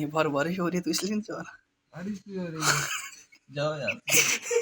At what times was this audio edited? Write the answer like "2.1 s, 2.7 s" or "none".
none